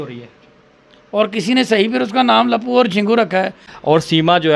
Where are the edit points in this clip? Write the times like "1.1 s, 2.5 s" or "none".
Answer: 3.7 s